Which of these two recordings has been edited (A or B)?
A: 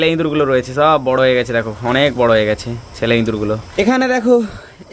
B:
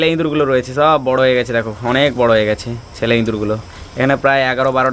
A